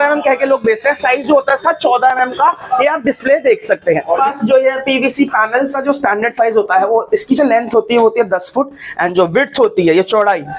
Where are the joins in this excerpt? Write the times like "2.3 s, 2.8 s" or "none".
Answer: 4.2 s, 5.8 s